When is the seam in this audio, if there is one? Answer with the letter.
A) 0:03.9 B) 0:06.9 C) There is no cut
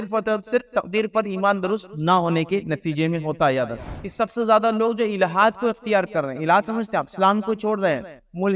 A